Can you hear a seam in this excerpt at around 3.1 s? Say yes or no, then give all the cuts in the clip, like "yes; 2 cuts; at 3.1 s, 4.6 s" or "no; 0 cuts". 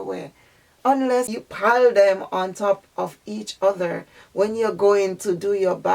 no; 1 cut; at 1.4 s